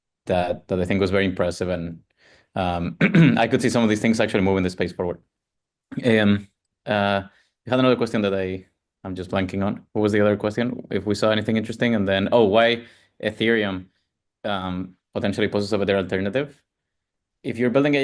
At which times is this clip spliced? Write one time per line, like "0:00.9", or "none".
none